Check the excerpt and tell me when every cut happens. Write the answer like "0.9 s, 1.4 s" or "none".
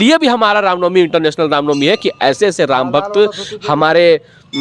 none